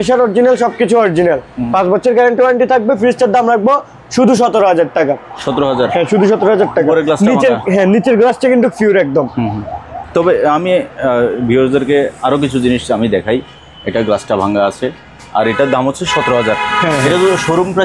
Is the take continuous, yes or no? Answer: yes